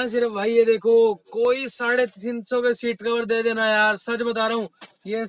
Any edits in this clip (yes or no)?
no